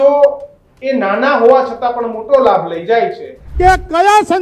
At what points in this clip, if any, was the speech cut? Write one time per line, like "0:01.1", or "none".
0:03.4